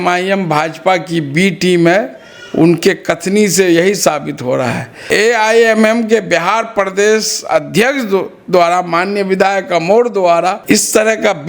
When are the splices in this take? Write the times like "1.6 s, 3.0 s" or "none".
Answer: 5.0 s